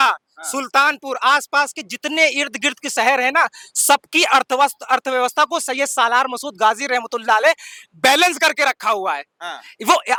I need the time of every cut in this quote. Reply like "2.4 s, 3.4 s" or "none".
none